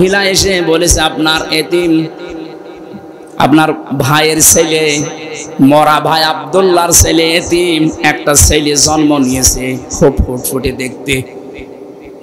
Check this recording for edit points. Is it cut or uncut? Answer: uncut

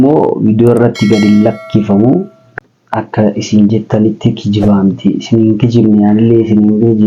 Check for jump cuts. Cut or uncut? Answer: cut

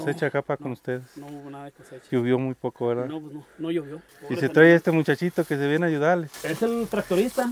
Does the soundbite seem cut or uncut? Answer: uncut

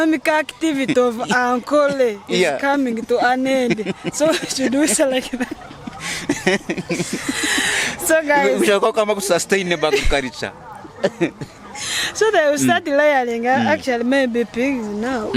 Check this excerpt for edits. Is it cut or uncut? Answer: uncut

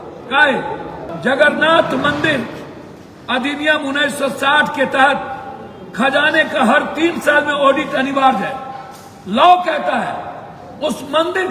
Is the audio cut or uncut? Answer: cut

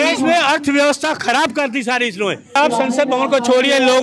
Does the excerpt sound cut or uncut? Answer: cut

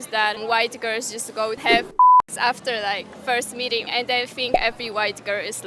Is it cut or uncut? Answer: cut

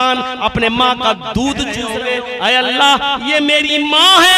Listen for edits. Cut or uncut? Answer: cut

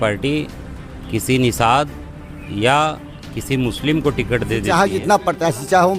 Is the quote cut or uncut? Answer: cut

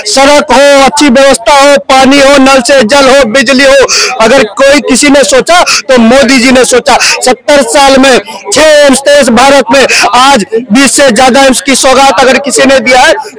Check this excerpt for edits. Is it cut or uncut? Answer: uncut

